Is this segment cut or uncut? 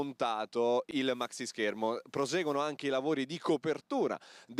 cut